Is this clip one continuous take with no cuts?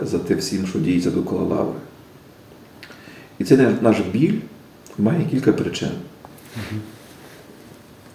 yes; 0 cuts

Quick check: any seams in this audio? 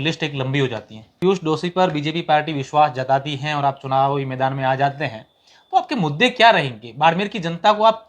yes; 1 cut; at 1.1 s

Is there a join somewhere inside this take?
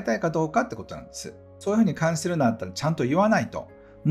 yes; 1 cut; at 1.5 s

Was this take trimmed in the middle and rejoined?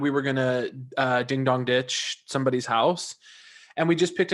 no; 0 cuts

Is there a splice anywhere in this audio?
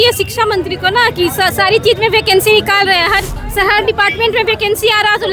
yes; 1 cut; at 3.4 s

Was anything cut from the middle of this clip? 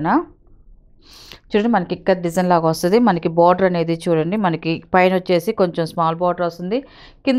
no; 0 cuts

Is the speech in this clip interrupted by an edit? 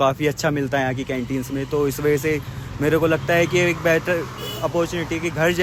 no; 0 cuts

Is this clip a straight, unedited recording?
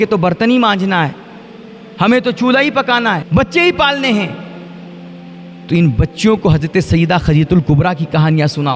yes; 0 cuts

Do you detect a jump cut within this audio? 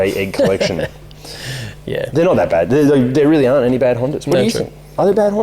no; 0 cuts

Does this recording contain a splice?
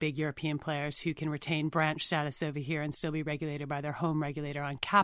no; 0 cuts

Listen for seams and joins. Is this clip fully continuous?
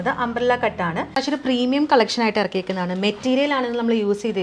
no; 1 cut; at 1.2 s

